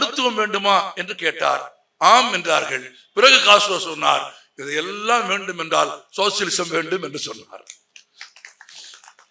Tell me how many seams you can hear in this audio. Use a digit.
0